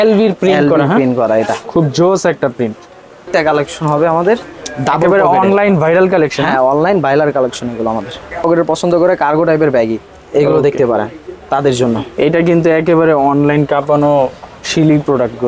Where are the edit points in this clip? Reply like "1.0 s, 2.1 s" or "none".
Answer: 3.3 s, 8.4 s